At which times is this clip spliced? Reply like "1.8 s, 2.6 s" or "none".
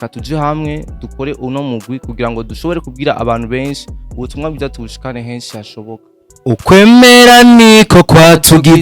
6.3 s